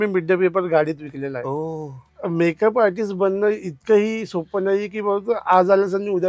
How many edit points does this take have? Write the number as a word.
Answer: one